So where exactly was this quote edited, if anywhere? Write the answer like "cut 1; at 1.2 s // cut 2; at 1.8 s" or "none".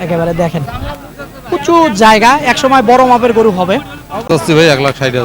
cut 1; at 4.3 s